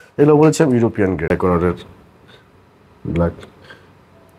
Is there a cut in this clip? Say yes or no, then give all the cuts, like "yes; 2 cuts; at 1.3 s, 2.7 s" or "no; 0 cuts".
yes; 1 cut; at 1.3 s